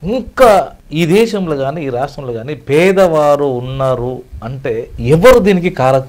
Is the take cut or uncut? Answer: uncut